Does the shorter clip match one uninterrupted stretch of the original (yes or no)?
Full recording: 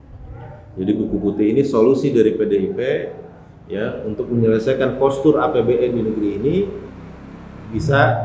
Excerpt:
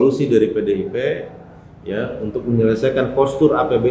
yes